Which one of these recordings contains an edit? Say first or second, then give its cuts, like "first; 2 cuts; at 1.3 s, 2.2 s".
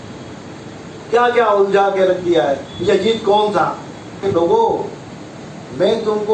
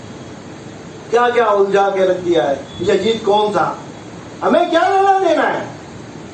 first; 1 cut; at 4.2 s